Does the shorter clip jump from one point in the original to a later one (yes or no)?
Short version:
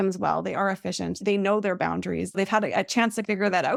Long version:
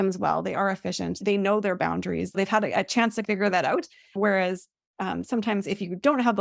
no